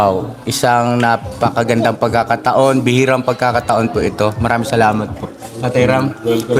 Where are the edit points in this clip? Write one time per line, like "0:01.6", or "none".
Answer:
none